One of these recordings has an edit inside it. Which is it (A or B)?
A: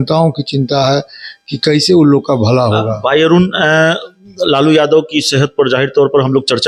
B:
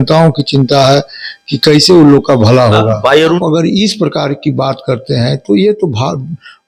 B